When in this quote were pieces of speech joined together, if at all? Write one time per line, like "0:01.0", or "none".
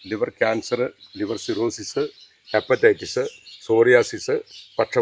none